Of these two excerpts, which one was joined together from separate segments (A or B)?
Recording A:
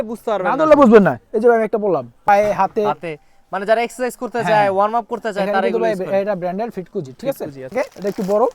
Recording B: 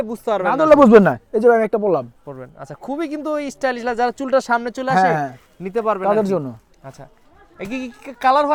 A